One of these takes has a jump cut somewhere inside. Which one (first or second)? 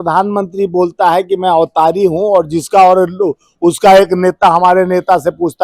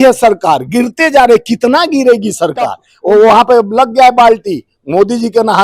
second